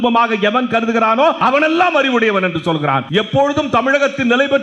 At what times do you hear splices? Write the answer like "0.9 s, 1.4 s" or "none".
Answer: 1.4 s, 3.0 s

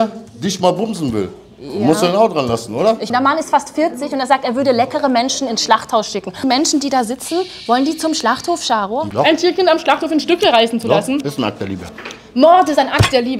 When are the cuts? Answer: 3.1 s, 6.4 s, 9.1 s

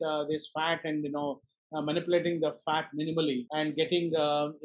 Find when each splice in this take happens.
3.5 s

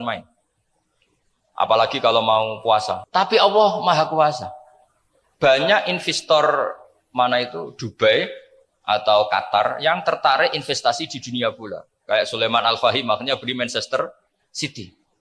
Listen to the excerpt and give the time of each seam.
3.0 s

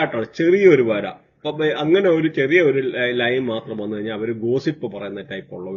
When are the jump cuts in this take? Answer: none

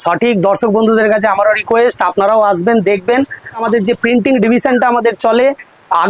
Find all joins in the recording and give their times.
3.6 s

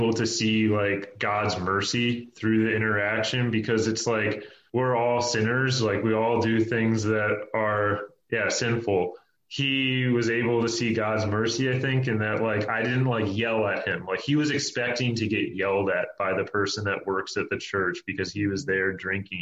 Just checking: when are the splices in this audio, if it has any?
none

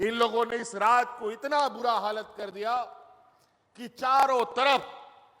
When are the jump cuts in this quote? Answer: none

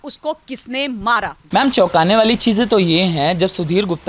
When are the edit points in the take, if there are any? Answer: none

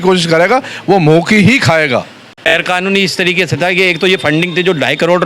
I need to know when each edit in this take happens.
2.4 s

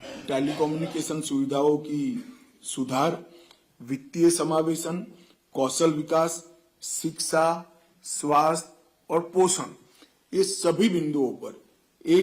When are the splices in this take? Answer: none

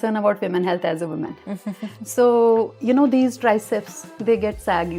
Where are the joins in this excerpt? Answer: none

